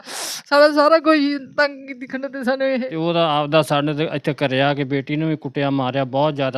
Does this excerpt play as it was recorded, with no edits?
no; 1 cut; at 2.9 s

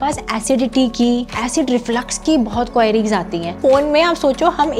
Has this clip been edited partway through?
yes; 2 cuts; at 1.4 s, 3.6 s

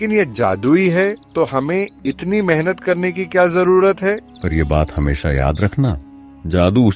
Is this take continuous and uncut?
no; 2 cuts; at 1.2 s, 4.3 s

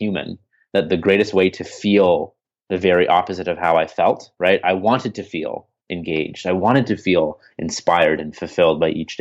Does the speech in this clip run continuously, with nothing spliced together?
yes; 0 cuts

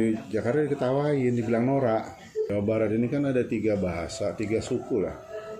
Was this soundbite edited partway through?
yes; 1 cut; at 2.5 s

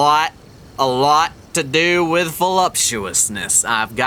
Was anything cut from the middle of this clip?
no; 0 cuts

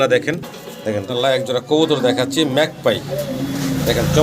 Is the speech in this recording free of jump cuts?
no; 1 cut; at 1.0 s

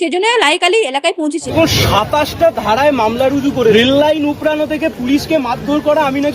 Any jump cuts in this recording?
yes; 2 cuts; at 1.5 s, 3.7 s

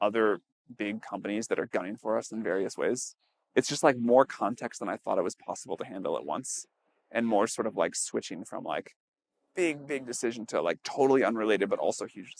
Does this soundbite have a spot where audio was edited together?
no; 0 cuts

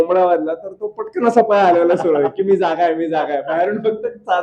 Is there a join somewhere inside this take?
no; 0 cuts

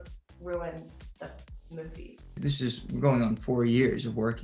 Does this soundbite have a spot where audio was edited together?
yes; 1 cut; at 2.3 s

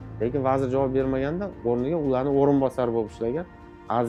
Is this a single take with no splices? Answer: yes; 0 cuts

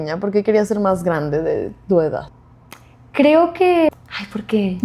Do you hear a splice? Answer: yes; 1 cut; at 3.9 s

